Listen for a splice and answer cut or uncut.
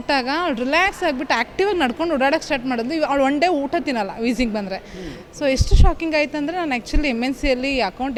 uncut